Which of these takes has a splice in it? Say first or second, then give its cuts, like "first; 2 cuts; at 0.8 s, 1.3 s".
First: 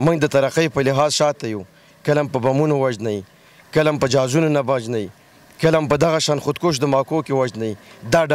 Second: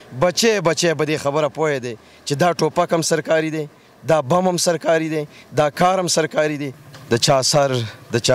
second; 1 cut; at 6.8 s